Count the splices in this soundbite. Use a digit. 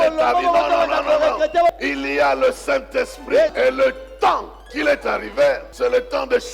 4